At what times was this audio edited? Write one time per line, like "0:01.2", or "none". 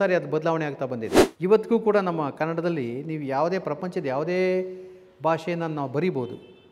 0:01.2